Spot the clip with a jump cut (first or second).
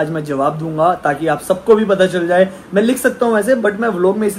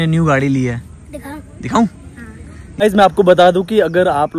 second